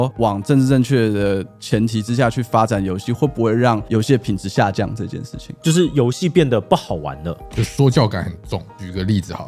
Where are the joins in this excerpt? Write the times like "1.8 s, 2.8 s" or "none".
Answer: none